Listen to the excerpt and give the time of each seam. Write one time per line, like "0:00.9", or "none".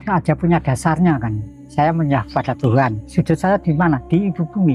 none